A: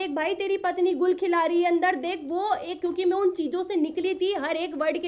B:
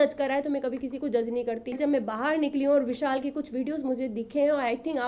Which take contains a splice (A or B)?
B